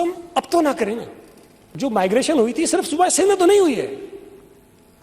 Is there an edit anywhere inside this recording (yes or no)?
yes